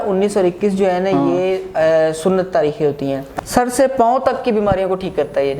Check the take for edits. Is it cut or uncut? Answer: cut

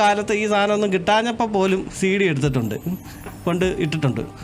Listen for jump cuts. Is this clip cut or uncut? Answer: uncut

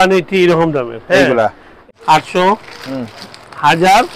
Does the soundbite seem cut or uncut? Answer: cut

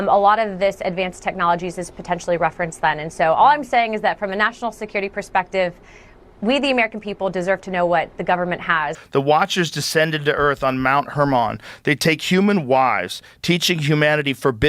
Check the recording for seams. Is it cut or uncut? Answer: cut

